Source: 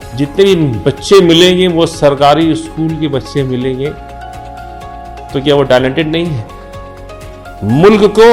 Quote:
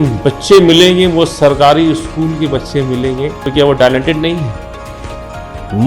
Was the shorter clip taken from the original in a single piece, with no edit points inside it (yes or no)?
no